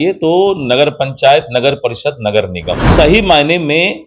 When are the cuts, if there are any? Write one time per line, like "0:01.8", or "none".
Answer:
0:02.9